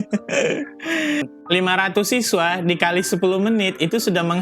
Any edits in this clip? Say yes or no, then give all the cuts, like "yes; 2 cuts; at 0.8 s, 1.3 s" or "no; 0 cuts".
yes; 1 cut; at 1.2 s